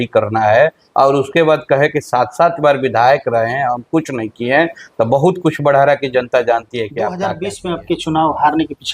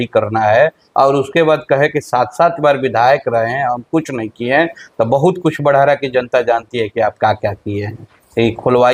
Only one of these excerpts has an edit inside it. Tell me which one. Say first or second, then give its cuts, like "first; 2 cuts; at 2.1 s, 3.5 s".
first; 1 cut; at 7.2 s